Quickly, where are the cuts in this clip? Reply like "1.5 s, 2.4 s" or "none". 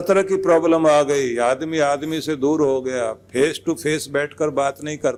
none